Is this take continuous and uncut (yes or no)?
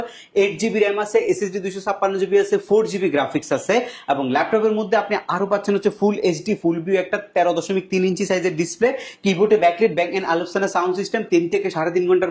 yes